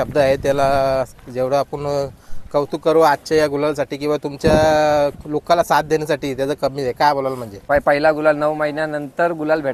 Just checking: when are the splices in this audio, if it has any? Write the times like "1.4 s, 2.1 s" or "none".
7.5 s